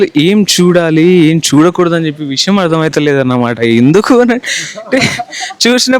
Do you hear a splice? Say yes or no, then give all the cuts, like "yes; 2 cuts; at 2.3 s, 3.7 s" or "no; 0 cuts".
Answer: no; 0 cuts